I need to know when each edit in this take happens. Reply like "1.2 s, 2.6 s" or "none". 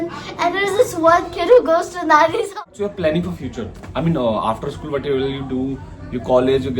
2.5 s